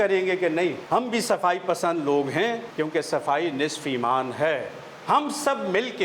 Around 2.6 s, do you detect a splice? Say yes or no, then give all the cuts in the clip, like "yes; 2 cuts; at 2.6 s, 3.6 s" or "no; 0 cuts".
yes; 3 cuts; at 0.8 s, 2.6 s, 4.9 s